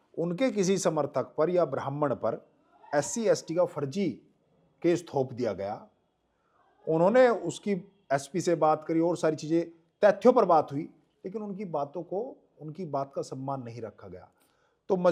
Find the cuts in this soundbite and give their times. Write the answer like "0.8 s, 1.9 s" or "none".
none